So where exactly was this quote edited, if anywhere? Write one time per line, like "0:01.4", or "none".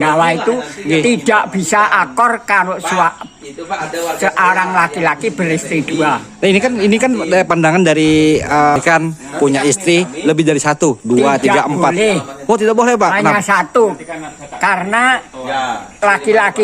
0:08.8